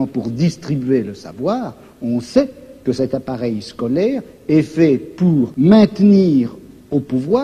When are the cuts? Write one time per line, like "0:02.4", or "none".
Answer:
0:05.5